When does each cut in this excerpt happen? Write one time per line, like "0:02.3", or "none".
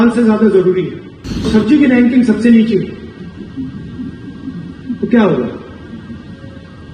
0:01.5